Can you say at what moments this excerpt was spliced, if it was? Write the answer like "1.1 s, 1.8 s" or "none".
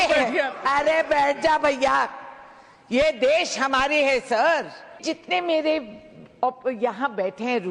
5.0 s